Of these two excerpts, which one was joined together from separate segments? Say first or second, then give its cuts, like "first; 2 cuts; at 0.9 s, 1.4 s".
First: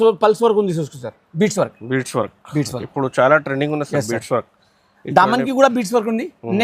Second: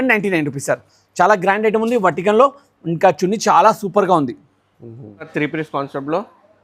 second; 1 cut; at 5.3 s